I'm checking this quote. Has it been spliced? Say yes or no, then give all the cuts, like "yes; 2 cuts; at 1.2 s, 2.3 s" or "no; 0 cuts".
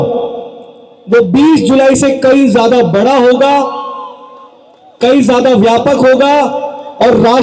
no; 0 cuts